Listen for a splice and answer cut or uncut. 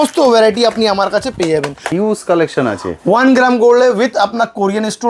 cut